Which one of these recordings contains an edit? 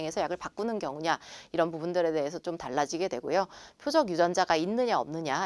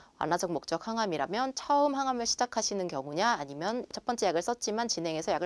second; 1 cut; at 3.9 s

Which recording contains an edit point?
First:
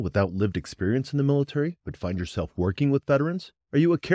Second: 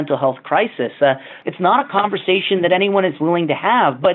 second; 1 cut; at 1.3 s

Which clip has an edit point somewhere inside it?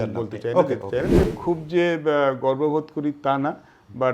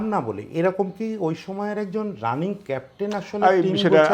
first; 1 cut; at 1.2 s

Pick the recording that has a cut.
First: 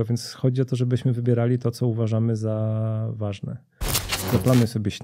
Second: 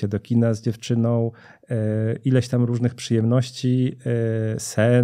first; 1 cut; at 4.1 s

